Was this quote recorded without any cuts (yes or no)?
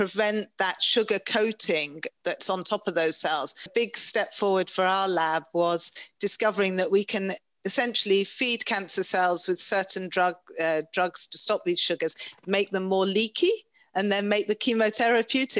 no